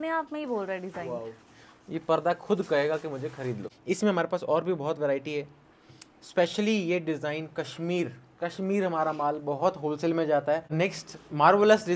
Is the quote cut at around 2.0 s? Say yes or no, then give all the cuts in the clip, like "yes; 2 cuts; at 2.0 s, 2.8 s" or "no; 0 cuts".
no; 2 cuts; at 3.7 s, 10.7 s